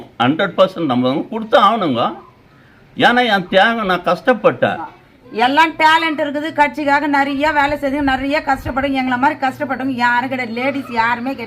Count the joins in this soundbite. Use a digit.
1